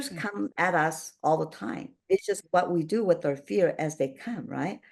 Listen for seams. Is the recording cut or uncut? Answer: cut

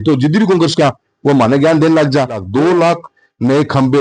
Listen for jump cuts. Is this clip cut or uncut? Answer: cut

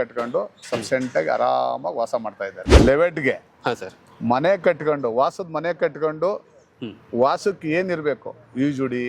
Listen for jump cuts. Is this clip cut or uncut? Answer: cut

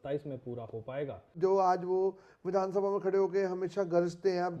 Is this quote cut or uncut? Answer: cut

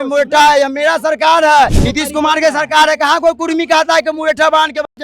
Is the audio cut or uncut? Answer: cut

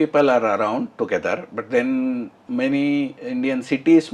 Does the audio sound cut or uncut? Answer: uncut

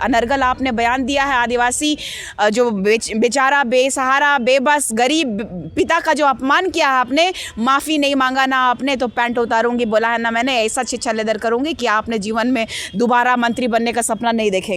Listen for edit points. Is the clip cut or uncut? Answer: uncut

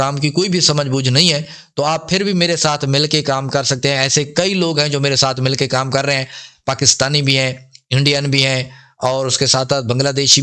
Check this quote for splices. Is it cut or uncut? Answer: uncut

